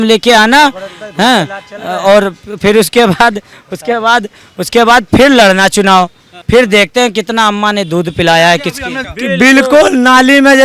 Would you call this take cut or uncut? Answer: cut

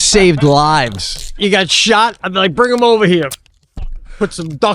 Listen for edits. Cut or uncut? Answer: cut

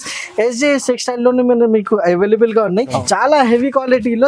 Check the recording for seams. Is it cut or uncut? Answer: cut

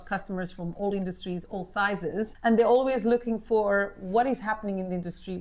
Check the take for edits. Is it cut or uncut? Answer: cut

